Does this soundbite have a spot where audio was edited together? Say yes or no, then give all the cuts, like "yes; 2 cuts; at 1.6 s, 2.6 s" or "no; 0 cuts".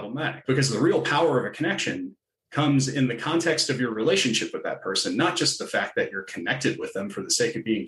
no; 0 cuts